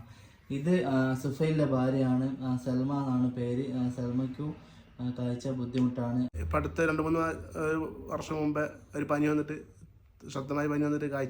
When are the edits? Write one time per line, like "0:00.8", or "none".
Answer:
0:06.4